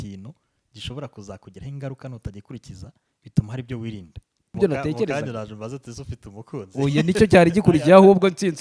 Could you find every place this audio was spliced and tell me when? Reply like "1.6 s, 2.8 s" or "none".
4.6 s